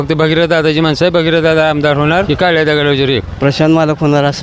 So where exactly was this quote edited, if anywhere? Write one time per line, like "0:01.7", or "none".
0:02.3
0:03.3